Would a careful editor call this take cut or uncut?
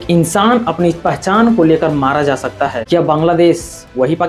cut